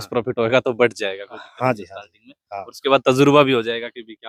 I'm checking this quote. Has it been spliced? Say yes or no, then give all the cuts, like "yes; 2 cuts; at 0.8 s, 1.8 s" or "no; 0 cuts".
no; 0 cuts